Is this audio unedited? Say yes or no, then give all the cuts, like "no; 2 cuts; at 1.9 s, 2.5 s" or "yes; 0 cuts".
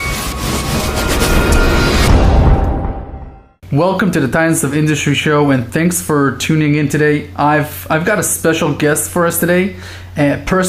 yes; 0 cuts